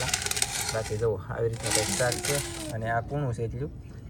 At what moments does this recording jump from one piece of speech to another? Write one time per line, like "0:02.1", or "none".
none